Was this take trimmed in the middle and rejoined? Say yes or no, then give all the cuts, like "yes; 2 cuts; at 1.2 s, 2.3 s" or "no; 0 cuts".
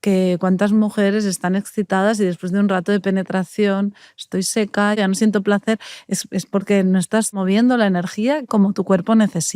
yes; 3 cuts; at 5.0 s, 7.4 s, 8.5 s